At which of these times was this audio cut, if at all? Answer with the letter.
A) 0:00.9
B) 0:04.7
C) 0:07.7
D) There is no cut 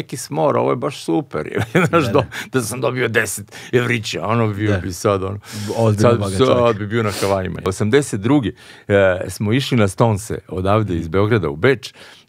C